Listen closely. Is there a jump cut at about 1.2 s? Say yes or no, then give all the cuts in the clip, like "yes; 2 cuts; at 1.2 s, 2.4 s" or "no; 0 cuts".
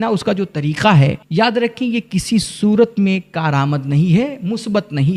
yes; 1 cut; at 1.2 s